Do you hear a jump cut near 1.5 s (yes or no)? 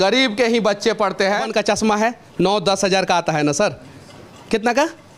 yes